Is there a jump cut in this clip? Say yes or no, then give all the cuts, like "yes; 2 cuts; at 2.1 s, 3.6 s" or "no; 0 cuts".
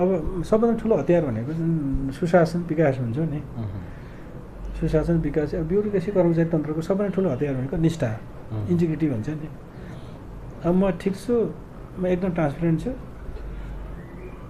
no; 0 cuts